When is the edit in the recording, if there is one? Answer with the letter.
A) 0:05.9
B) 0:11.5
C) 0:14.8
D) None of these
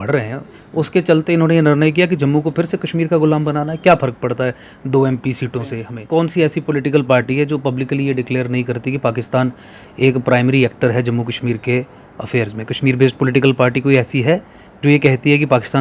A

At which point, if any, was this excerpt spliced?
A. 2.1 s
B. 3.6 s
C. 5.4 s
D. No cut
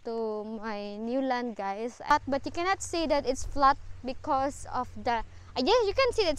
A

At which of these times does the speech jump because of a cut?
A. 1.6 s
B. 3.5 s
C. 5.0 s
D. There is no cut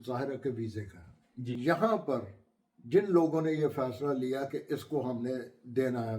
A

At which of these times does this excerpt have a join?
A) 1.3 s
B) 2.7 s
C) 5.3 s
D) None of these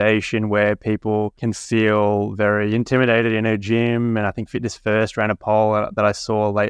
A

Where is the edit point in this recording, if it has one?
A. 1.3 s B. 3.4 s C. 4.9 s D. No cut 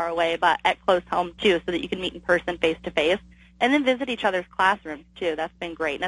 A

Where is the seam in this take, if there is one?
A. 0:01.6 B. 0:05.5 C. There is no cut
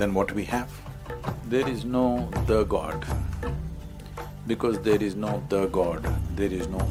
C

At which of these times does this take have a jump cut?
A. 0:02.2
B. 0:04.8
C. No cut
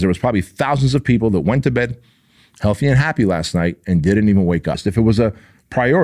B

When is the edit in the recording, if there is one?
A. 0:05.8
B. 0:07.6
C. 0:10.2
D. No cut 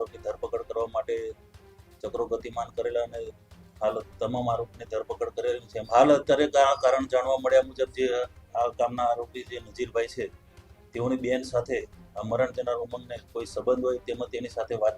A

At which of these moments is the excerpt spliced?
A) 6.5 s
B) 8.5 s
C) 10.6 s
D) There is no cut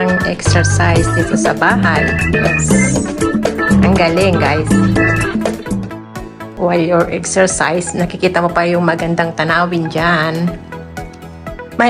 A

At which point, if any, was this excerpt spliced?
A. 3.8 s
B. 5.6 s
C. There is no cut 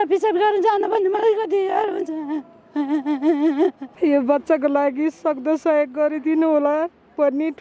A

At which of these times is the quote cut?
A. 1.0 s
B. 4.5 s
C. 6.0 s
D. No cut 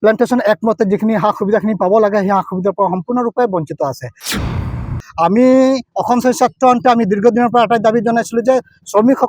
B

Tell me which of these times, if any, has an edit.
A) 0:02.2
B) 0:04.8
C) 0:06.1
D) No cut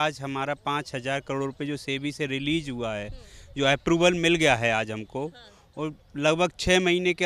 D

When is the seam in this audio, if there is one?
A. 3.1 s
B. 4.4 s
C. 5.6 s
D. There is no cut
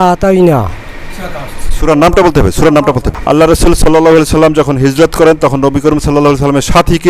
A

